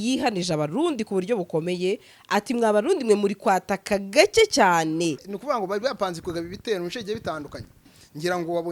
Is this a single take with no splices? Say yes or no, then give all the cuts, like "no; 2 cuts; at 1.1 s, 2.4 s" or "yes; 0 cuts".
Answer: no; 1 cut; at 5.3 s